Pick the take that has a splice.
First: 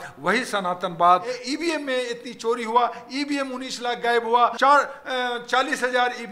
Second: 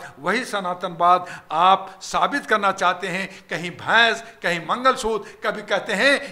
first; 2 cuts; at 1.3 s, 4.5 s

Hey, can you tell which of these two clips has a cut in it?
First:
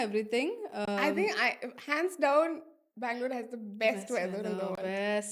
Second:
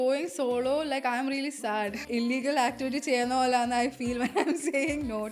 second; 1 cut; at 2.1 s

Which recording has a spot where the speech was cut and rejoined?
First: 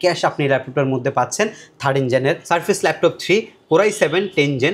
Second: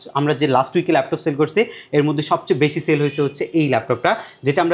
first; 1 cut; at 2.4 s

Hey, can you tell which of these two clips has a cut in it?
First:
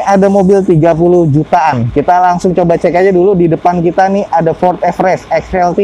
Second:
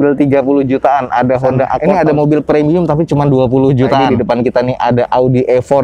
second; 2 cuts; at 1.8 s, 4.1 s

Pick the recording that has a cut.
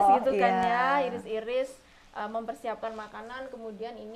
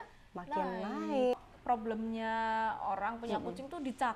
second; 1 cut; at 1.4 s

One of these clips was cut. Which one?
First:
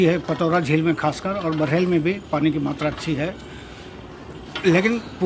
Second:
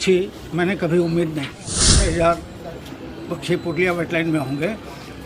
second; 1 cut; at 2.0 s

